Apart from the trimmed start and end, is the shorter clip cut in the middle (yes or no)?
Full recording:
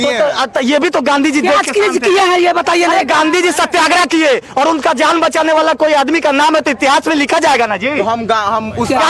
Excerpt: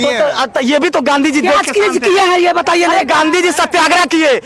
no